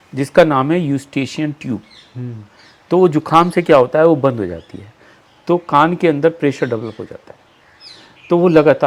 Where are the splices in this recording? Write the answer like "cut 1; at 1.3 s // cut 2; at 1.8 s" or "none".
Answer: none